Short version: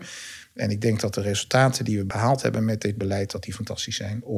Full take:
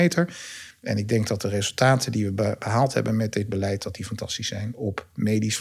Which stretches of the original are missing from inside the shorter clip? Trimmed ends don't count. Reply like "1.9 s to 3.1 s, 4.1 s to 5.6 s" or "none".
2.3 s to 2.6 s